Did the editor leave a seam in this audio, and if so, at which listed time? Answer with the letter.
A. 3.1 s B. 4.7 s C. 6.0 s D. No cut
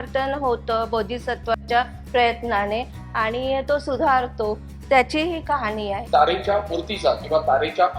C